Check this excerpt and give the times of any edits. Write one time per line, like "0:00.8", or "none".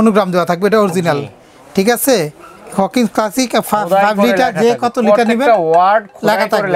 none